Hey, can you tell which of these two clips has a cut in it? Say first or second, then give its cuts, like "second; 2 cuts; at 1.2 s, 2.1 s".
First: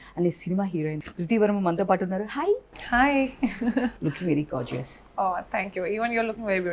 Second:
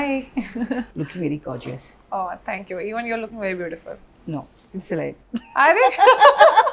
first; 1 cut; at 1.0 s